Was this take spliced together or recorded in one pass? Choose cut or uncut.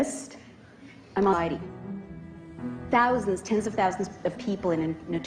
uncut